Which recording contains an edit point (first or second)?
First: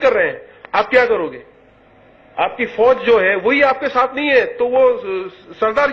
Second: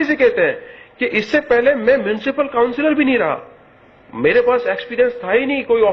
first